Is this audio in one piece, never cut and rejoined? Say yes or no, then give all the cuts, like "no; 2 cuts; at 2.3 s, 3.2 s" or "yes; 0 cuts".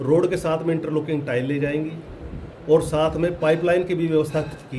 yes; 0 cuts